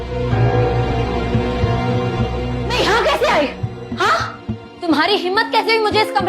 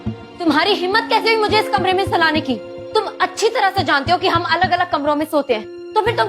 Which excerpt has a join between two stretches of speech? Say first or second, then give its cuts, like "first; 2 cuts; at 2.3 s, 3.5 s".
first; 1 cut; at 0.9 s